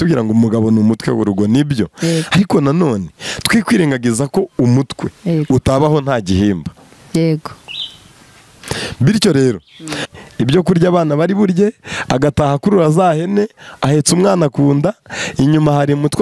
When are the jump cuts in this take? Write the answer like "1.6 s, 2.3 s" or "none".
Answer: 10.0 s